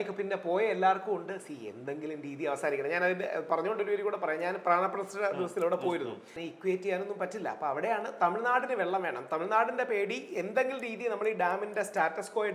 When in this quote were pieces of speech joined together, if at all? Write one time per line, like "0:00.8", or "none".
0:06.4